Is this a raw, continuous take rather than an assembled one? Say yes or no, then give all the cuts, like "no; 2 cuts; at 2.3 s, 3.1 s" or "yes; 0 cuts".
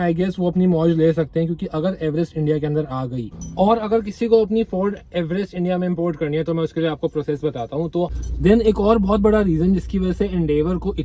no; 2 cuts; at 3.2 s, 8.1 s